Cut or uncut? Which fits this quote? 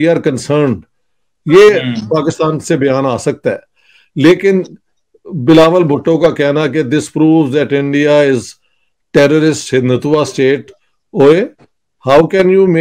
uncut